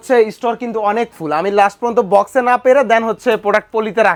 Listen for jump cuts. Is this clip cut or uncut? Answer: uncut